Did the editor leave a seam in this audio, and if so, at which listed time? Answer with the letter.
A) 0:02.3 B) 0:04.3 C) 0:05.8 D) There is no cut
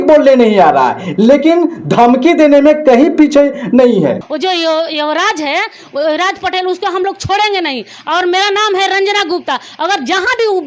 B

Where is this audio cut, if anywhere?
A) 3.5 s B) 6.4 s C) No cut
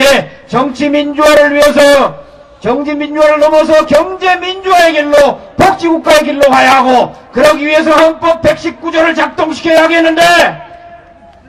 C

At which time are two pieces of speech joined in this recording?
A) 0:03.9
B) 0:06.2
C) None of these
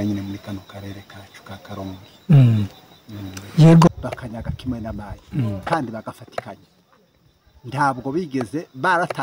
A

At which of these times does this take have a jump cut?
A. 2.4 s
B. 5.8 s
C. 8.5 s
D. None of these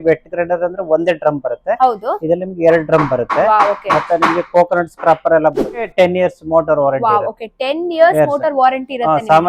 B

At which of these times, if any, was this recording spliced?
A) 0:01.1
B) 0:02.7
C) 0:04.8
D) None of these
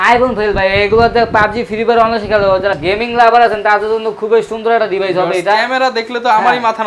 D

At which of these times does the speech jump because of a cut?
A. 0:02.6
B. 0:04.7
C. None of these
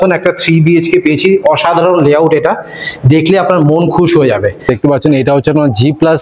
B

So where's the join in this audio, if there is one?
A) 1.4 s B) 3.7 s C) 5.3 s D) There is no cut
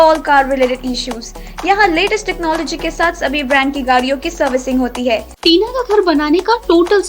C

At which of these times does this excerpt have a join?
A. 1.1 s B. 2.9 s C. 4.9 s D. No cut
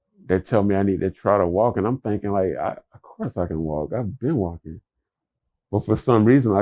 D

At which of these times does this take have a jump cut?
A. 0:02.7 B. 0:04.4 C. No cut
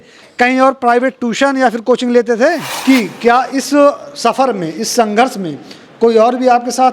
A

